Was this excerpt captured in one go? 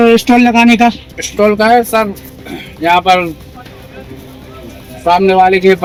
yes; 0 cuts

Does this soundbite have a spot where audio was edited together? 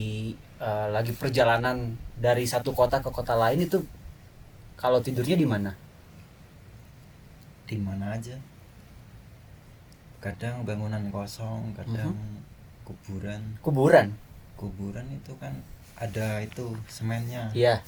no; 0 cuts

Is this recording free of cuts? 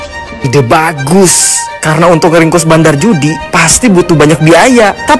yes; 0 cuts

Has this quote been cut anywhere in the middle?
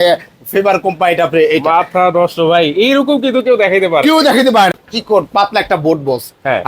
yes; 1 cut; at 4.8 s

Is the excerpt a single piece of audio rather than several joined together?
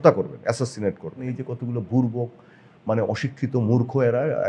no; 1 cut; at 1.2 s

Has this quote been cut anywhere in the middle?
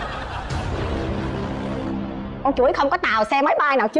no; 0 cuts

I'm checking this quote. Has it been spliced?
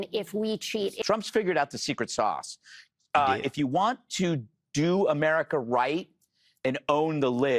yes; 1 cut; at 1.0 s

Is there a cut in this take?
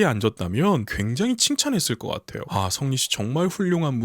yes; 2 cuts; at 1.0 s, 2.3 s

